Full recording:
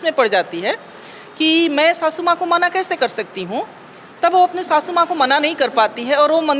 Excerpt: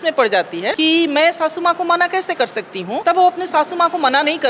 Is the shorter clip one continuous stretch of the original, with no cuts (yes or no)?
no